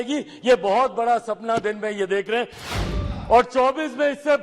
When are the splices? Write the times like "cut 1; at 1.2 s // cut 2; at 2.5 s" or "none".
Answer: cut 1; at 2.7 s